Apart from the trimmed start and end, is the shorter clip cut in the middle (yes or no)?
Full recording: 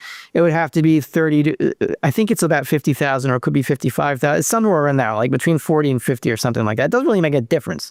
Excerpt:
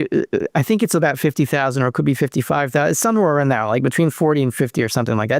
no